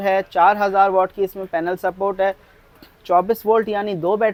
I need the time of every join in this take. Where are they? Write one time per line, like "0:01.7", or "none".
none